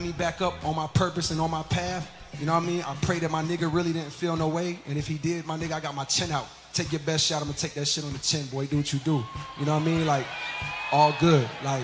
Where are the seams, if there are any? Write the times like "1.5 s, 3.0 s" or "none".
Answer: 1.6 s, 8.8 s